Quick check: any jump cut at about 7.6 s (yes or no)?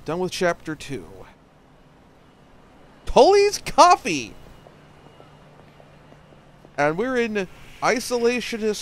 yes